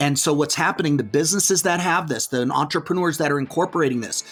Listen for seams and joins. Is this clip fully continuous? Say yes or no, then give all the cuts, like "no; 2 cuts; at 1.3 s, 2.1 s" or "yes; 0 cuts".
yes; 0 cuts